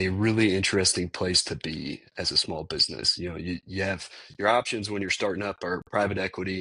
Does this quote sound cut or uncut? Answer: uncut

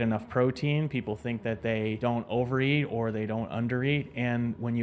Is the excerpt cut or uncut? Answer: cut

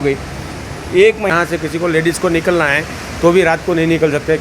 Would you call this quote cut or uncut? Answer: cut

